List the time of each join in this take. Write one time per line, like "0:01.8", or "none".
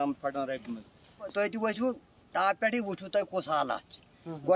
0:01.3